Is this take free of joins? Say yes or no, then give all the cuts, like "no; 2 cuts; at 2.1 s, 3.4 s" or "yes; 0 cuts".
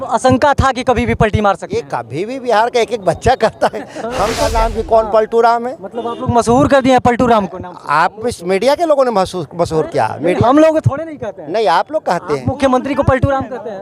no; 1 cut; at 4.5 s